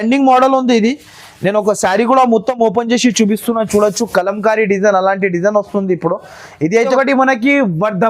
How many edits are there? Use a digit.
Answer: 1